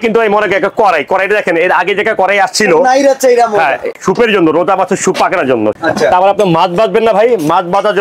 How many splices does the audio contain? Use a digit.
2